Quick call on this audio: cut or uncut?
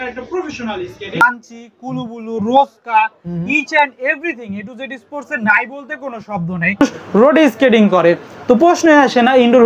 cut